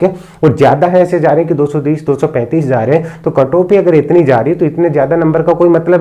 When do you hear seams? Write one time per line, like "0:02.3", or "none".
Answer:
none